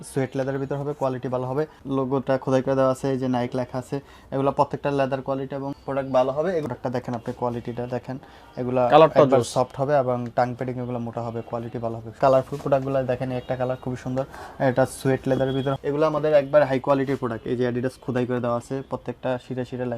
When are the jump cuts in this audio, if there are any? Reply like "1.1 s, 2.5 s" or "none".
1.8 s, 6.6 s, 12.2 s, 15.7 s